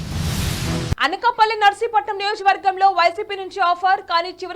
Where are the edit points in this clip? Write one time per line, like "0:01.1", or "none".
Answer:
0:00.9